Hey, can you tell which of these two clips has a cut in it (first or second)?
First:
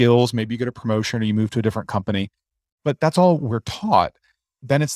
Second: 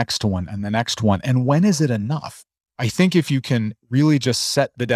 second